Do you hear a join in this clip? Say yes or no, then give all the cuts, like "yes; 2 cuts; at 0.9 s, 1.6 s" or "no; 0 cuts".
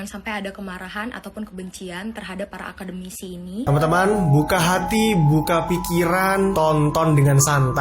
yes; 1 cut; at 3.6 s